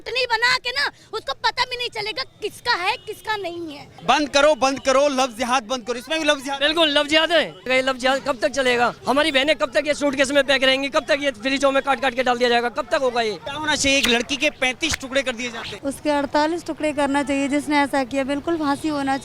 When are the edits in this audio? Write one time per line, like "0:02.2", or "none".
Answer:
0:03.9
0:07.7
0:09.0
0:13.5
0:15.7